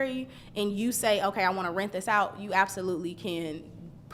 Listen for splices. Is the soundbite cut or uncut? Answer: uncut